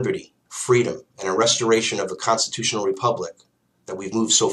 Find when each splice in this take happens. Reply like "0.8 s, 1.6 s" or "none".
2.6 s